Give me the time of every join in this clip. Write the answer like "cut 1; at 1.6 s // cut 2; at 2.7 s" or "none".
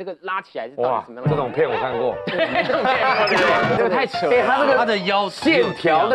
cut 1; at 3.8 s